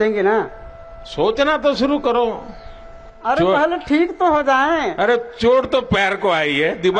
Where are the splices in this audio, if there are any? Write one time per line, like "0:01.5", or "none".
none